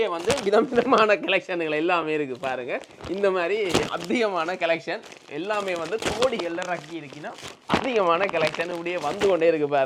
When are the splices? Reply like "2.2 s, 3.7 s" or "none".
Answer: none